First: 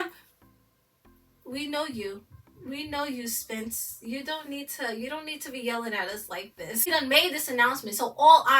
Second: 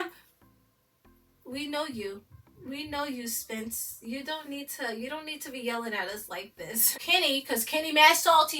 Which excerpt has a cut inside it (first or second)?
first